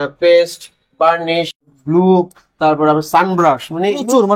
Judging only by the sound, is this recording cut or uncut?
cut